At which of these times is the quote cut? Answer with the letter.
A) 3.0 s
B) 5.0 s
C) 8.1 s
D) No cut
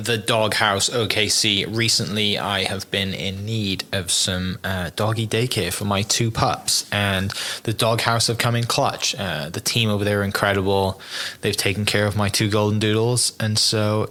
D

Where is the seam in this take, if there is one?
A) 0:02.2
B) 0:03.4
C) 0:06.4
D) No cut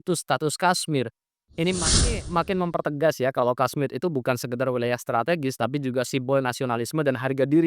A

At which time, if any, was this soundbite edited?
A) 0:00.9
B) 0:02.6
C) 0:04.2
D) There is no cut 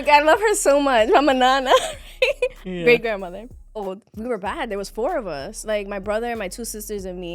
C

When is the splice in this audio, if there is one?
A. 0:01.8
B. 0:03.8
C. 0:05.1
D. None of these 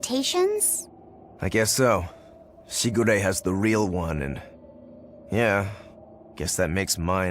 C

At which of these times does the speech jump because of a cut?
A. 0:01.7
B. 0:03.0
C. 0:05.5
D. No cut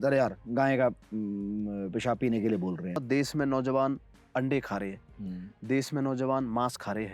B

